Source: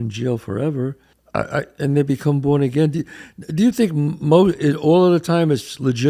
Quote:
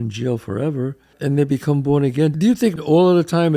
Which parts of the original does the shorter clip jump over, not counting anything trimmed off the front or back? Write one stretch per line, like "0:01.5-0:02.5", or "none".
0:01.1-0:01.7
0:03.4-0:04.8